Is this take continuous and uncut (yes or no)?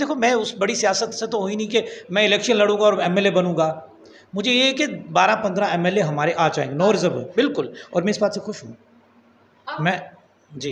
yes